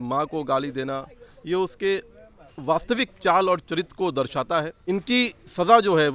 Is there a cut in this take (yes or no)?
yes